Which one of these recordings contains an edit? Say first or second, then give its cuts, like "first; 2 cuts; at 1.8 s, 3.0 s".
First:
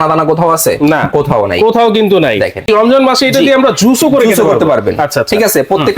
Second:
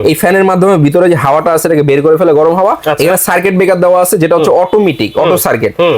first; 1 cut; at 2.6 s